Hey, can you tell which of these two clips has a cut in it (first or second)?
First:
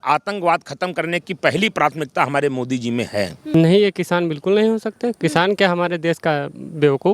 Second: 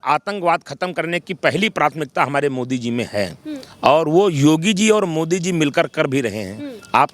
first